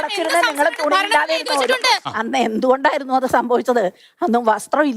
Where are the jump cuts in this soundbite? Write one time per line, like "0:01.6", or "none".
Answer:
0:02.1

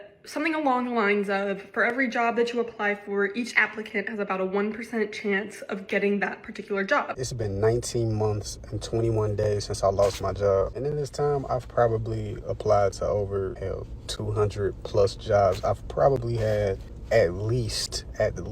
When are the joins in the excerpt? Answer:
0:07.1
0:10.8
0:13.6
0:16.9

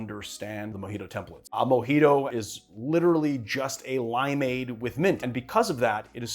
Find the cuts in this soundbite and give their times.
0:01.4
0:02.3
0:05.2

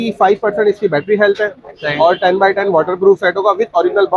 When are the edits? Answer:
none

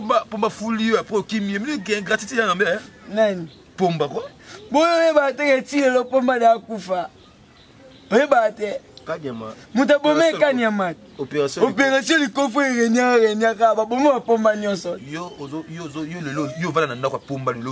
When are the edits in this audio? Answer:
none

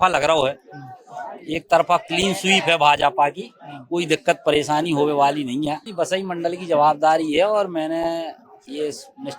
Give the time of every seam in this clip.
0:05.9

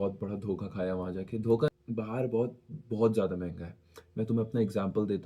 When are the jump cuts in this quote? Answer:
0:01.7

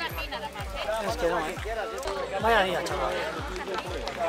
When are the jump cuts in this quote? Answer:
0:02.0

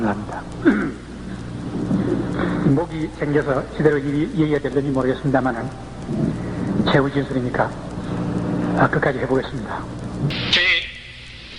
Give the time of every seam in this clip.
0:10.3

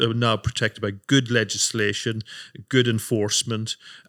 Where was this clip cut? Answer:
none

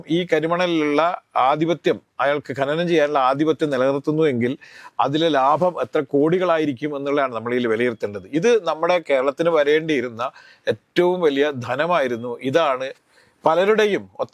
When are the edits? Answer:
none

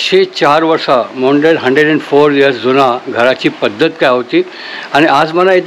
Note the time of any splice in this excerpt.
none

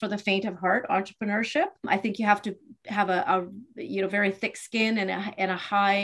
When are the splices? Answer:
0:01.8

